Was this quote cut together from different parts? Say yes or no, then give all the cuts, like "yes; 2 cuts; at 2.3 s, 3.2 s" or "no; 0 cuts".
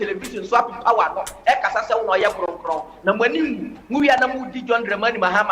no; 0 cuts